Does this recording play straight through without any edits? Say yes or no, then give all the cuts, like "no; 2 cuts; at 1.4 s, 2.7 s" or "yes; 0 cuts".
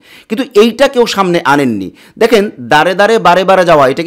yes; 0 cuts